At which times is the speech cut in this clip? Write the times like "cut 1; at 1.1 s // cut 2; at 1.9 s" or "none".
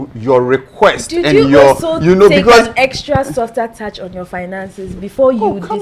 none